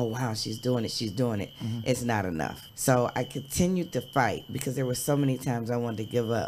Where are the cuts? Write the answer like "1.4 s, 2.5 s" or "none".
none